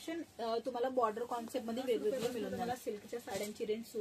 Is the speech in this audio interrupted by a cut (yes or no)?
yes